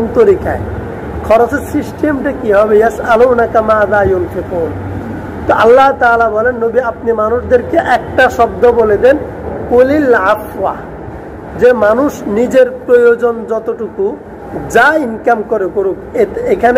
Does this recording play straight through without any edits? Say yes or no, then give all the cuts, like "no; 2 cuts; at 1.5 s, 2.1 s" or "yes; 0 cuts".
yes; 0 cuts